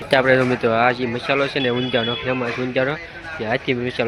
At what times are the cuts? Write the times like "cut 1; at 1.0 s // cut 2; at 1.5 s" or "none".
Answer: none